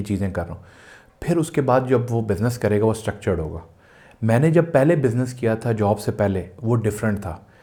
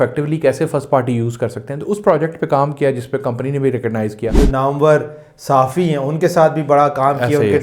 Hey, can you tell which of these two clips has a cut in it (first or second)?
second